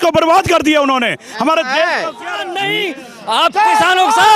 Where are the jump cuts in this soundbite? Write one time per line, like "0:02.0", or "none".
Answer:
0:02.5